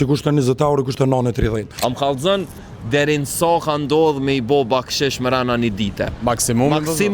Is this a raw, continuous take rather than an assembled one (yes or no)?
no